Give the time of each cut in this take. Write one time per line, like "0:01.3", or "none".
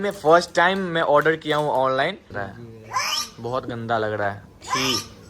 0:02.3